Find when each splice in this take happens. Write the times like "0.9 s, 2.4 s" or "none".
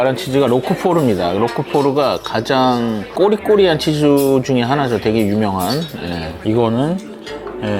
3.0 s, 6.3 s